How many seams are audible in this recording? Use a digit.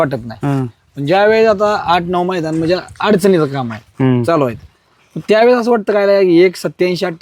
0